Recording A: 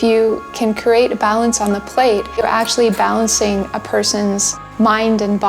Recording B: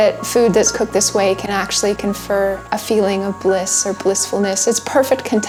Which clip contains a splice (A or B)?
A